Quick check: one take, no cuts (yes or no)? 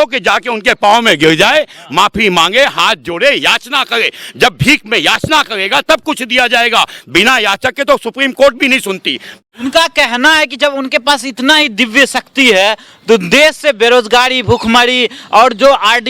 no